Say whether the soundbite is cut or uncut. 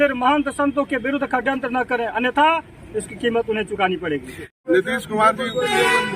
cut